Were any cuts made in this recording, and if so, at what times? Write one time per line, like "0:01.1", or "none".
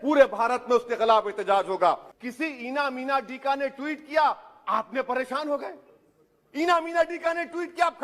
0:02.1